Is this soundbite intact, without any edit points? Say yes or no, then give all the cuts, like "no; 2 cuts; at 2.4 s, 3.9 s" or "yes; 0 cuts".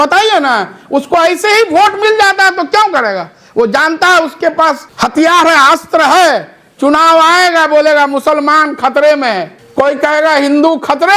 no; 2 cuts; at 4.9 s, 9.5 s